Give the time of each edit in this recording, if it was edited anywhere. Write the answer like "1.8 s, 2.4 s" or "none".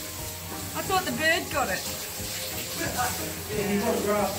none